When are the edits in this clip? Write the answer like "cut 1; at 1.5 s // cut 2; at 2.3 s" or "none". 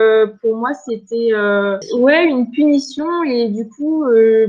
cut 1; at 1.8 s

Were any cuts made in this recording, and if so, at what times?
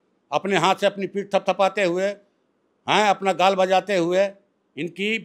none

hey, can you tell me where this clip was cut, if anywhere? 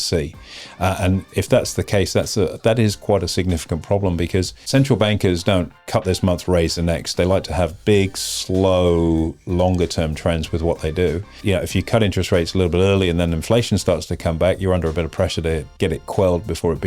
cut 1; at 4.6 s // cut 2; at 5.8 s // cut 3; at 11.3 s

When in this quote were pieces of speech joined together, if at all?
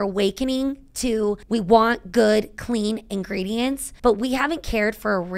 cut 1; at 1.4 s // cut 2; at 3.9 s

